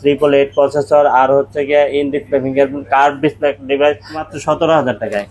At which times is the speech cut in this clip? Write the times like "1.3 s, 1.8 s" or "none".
4.3 s